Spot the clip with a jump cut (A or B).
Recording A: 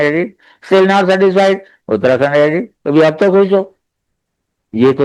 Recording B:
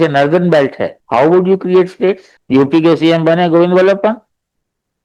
B